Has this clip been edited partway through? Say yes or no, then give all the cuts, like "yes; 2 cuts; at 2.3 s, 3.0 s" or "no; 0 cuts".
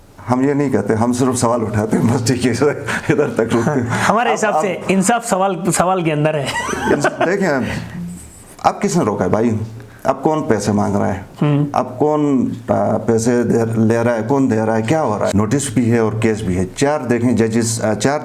yes; 1 cut; at 15.3 s